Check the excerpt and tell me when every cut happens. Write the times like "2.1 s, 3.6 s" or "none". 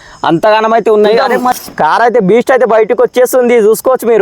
1.6 s